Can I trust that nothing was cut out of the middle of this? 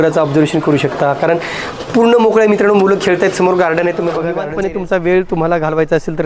no; 1 cut; at 4.4 s

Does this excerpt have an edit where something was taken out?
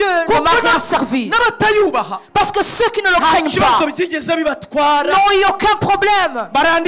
no; 0 cuts

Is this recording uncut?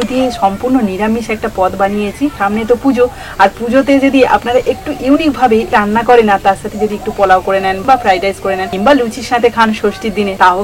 no; 4 cuts; at 2.4 s, 5.7 s, 7.8 s, 8.7 s

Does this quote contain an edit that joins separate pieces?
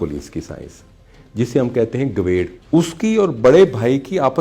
yes; 1 cut; at 2.6 s

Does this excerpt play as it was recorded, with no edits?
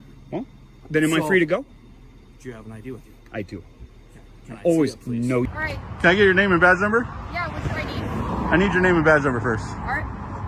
no; 1 cut; at 5.5 s

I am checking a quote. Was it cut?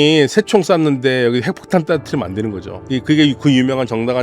yes; 1 cut; at 2.8 s

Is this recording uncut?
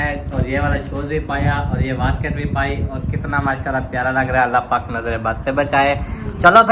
yes; 0 cuts

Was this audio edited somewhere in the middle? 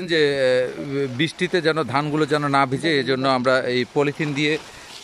no; 0 cuts

